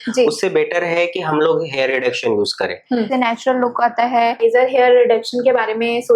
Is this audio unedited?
no; 2 cuts; at 3.1 s, 4.4 s

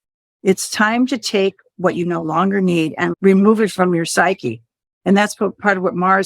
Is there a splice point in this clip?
yes; 1 cut; at 3.1 s

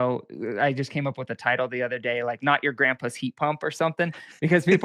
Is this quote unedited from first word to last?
yes; 0 cuts

